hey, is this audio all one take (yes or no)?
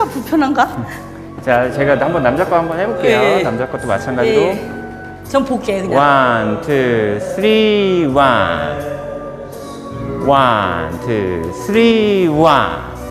yes